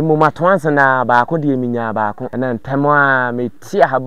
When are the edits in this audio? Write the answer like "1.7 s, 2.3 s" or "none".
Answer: 2.2 s